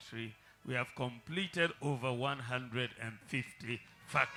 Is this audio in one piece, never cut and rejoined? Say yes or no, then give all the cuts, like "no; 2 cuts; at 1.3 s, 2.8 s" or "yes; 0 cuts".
yes; 0 cuts